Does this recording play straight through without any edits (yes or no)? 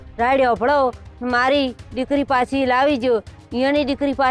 yes